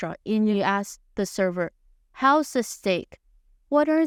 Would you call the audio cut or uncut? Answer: uncut